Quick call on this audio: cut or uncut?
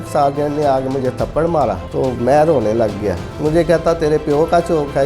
cut